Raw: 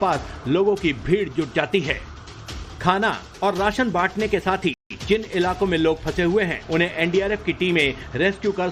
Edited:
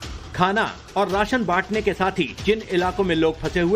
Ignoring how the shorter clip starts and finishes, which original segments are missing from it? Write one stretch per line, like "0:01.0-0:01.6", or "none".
0:04.8-0:05.0